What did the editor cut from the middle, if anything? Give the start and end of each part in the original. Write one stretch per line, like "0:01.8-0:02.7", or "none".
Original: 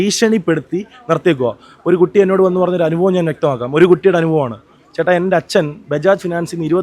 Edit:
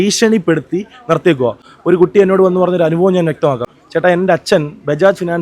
0:03.6-0:04.7